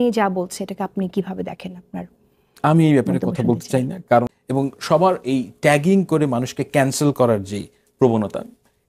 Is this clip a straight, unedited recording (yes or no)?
no